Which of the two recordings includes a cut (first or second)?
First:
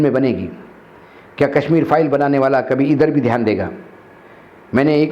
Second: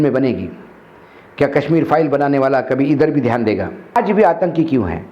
second